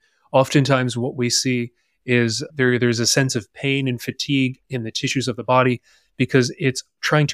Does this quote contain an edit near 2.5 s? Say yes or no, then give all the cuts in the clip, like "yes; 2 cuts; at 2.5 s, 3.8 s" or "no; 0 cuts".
yes; 1 cut; at 2.5 s